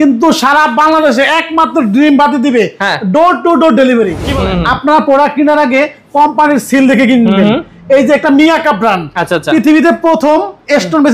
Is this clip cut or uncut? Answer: cut